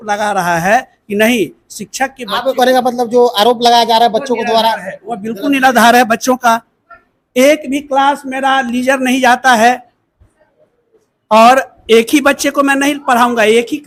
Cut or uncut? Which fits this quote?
uncut